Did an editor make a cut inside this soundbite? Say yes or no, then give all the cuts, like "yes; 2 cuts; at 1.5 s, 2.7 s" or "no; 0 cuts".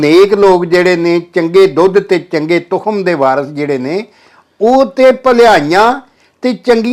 no; 0 cuts